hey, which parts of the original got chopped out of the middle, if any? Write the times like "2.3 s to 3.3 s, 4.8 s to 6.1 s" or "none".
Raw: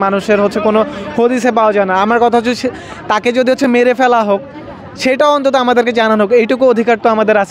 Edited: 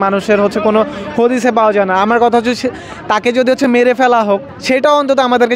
4.5 s to 4.9 s